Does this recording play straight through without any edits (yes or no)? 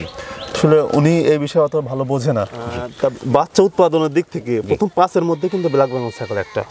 no